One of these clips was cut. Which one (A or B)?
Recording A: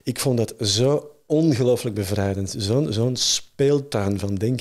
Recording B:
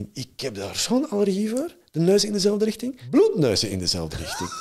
B